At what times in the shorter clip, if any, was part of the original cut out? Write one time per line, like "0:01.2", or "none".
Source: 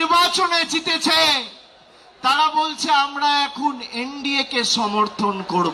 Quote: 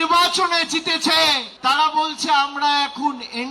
0:01.5

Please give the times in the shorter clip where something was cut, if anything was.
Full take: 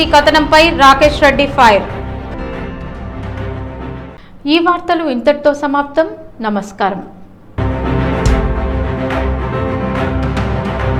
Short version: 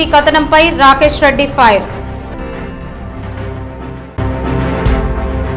0:04.0

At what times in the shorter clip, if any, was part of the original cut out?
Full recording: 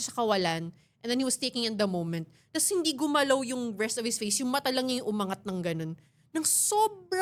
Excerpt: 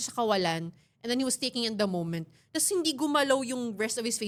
none

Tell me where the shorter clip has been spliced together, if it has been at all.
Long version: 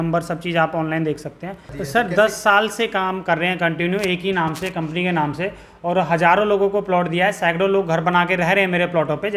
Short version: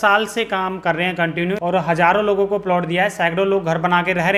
0:01.6

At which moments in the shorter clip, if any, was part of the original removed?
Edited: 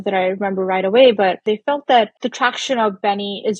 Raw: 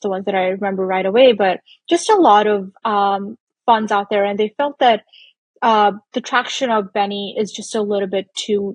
0:01.4
0:02.2

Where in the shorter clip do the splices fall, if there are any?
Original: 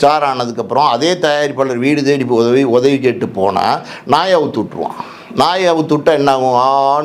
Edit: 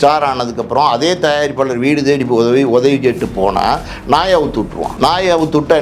0:04.8

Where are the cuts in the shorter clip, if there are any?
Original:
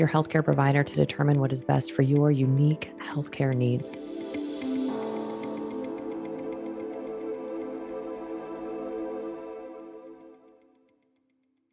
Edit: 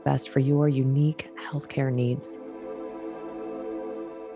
0:02.3

